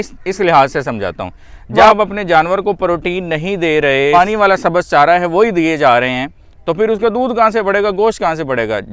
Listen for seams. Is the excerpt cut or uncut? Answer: cut